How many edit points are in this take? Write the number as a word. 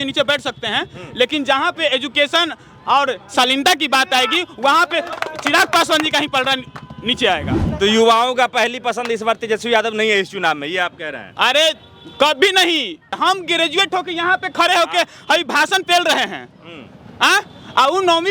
three